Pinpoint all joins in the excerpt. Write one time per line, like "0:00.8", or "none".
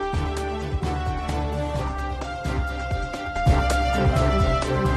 0:03.3